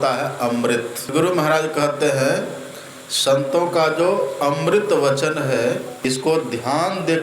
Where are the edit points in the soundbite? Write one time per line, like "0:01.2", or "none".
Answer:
0:01.1
0:05.9